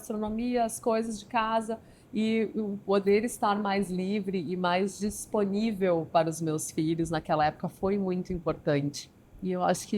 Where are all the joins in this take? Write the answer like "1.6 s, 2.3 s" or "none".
9.1 s